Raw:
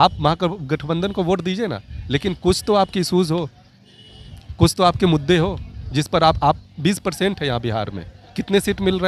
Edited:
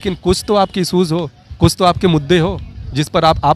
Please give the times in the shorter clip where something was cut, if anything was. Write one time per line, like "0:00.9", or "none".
0:01.4